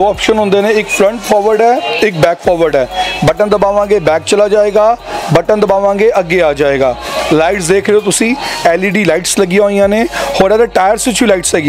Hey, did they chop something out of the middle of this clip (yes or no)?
no